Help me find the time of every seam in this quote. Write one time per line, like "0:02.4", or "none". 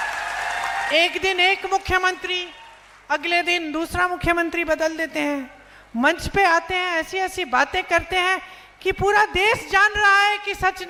none